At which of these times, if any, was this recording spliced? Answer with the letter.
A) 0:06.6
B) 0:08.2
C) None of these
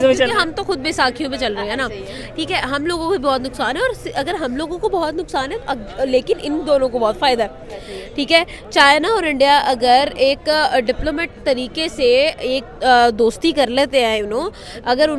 C